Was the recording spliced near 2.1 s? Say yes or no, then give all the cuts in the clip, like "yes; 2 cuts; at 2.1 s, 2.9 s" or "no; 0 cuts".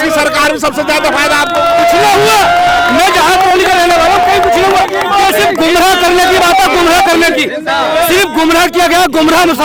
no; 0 cuts